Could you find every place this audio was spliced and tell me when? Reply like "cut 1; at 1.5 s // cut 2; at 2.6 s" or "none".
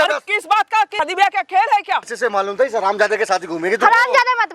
cut 1; at 1.0 s // cut 2; at 2.1 s